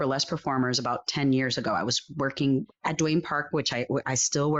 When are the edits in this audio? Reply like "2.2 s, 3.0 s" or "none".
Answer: 2.7 s